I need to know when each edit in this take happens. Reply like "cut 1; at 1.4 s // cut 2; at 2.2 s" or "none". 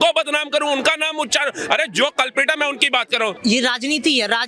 cut 1; at 3.4 s